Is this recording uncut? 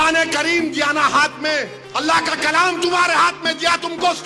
no; 1 cut; at 1.8 s

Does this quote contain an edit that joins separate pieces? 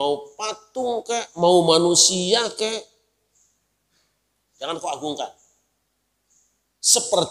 no; 0 cuts

